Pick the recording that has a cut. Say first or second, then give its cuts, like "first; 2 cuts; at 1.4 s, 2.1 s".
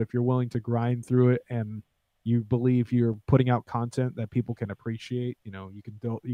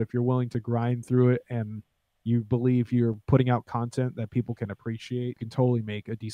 second; 1 cut; at 5.4 s